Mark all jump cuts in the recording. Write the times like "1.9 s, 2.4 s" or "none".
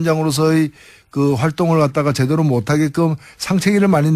none